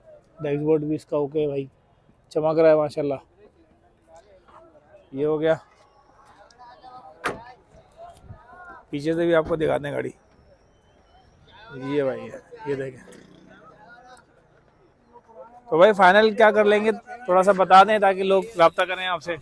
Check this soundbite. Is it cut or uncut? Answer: uncut